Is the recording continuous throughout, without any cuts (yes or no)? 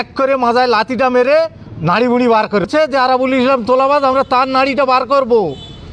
no